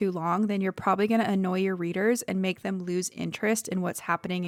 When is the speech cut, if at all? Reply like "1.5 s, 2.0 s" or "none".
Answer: none